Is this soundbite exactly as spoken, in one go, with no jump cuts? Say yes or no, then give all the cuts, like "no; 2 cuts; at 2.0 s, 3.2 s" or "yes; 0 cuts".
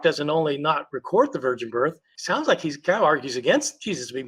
no; 1 cut; at 2.1 s